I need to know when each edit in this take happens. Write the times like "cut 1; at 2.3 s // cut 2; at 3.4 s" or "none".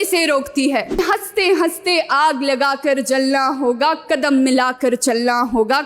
cut 1; at 1.0 s

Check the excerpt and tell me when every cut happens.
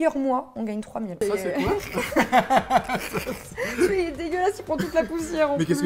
cut 1; at 1.1 s

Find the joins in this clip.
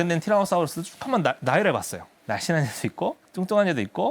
cut 1; at 2.1 s

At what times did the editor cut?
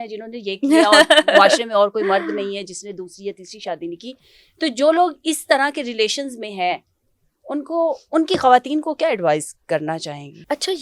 none

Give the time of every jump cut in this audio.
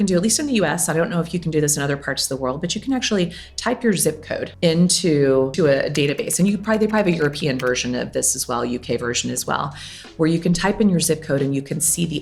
cut 1; at 4.5 s // cut 2; at 5.5 s

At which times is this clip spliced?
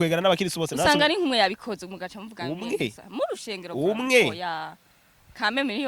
none

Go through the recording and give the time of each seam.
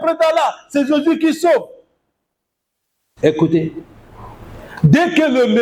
none

